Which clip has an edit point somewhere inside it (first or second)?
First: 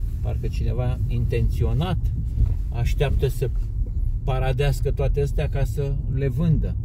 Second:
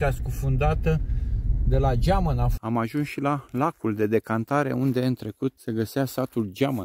second